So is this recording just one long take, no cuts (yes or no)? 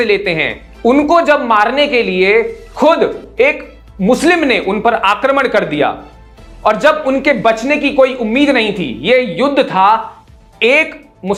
yes